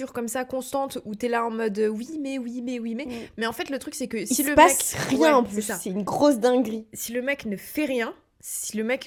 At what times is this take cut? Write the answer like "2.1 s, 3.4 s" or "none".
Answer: none